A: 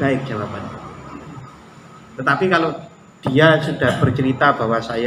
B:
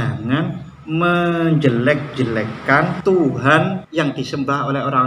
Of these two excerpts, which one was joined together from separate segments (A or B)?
B